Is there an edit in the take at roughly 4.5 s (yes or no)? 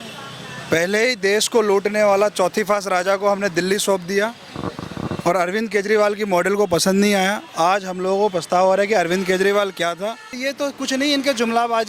no